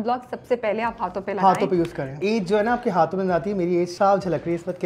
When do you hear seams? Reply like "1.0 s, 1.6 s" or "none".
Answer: 2.1 s, 3.9 s